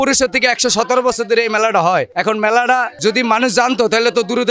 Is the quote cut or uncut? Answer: uncut